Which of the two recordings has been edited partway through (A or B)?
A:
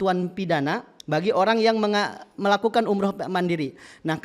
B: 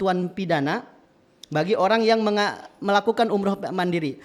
A